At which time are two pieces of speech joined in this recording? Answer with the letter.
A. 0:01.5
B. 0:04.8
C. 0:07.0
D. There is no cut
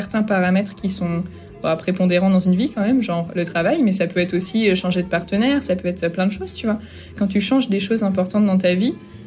C